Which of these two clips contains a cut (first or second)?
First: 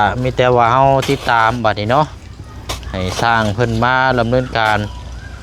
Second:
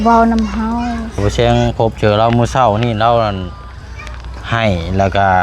second